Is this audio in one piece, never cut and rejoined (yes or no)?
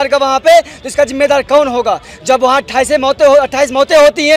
yes